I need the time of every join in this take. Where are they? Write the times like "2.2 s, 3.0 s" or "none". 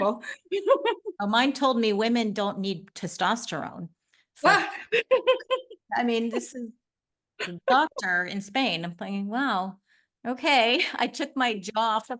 none

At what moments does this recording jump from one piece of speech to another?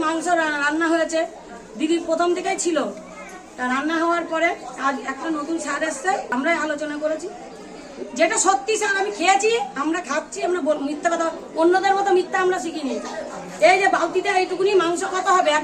6.3 s

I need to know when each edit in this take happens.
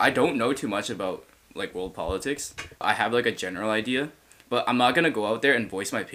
2.8 s

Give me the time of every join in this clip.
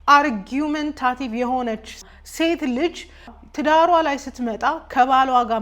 2.0 s, 3.4 s

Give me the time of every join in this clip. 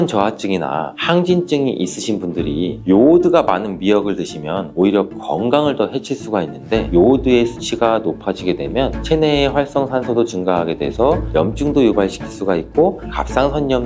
6.9 s

